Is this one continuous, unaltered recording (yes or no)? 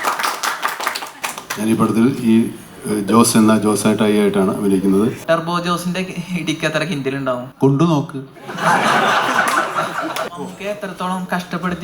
no